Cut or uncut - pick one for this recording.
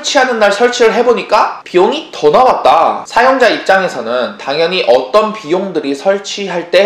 cut